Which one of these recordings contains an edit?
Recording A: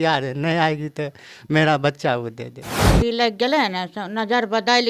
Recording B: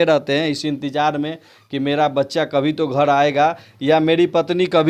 A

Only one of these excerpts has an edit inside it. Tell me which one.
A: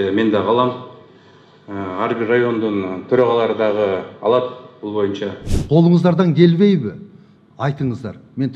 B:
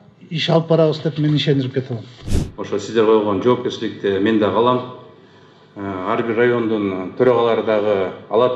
A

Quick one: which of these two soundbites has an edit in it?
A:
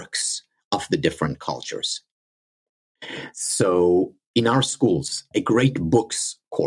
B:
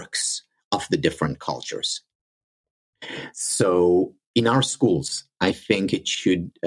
A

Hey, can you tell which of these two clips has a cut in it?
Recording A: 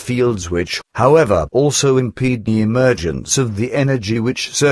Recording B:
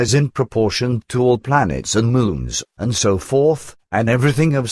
B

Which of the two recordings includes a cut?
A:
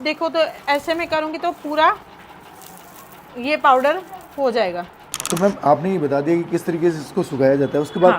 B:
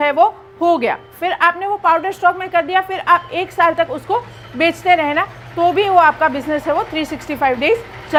A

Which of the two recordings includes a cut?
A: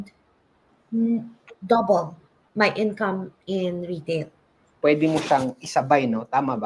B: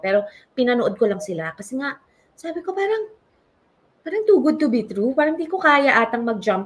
A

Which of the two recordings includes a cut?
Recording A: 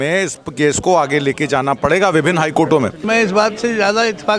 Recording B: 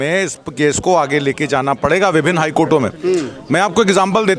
A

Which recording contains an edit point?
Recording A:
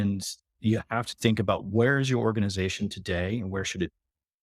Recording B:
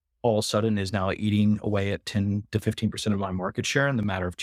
A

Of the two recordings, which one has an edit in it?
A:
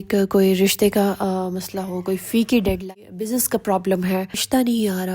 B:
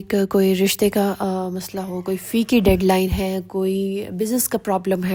A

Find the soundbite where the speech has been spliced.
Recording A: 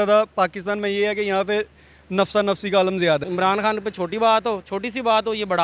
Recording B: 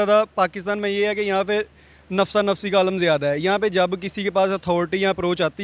A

